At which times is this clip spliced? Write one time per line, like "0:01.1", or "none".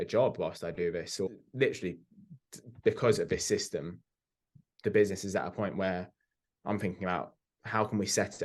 0:01.3